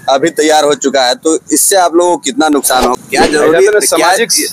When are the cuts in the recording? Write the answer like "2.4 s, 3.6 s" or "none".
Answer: 3.0 s